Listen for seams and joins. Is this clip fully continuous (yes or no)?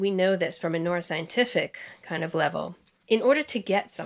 yes